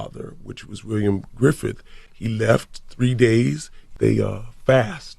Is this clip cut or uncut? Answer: cut